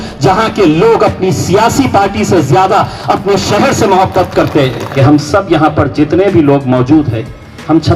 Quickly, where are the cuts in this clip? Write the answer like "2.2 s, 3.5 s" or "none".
4.9 s

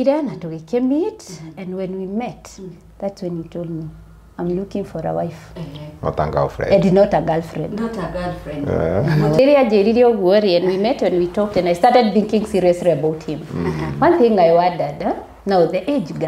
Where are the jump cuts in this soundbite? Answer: 9.3 s

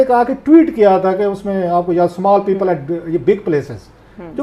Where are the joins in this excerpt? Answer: none

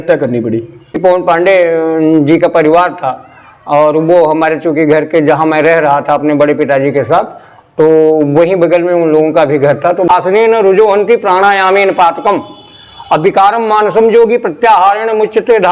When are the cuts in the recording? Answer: 0.9 s, 10.1 s

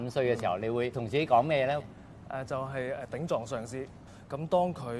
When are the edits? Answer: 1.0 s, 4.1 s

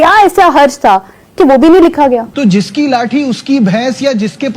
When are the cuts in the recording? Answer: 2.3 s

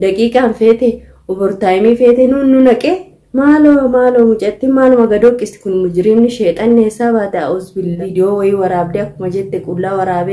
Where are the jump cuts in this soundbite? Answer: 8.0 s

